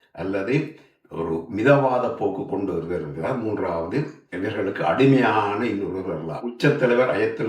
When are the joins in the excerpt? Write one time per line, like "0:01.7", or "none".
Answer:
0:06.5